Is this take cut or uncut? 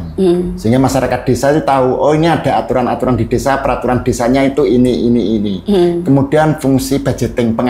uncut